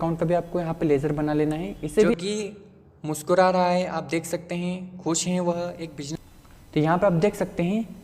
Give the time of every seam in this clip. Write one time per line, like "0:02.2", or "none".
0:02.1
0:06.0